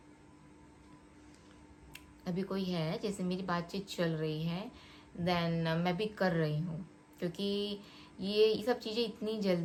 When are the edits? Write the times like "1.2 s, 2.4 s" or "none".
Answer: none